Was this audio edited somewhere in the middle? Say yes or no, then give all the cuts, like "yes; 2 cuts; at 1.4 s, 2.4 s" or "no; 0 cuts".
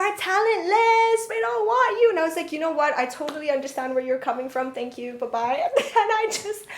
no; 0 cuts